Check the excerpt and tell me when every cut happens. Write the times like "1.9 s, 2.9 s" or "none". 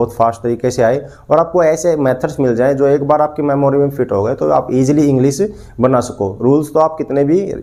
none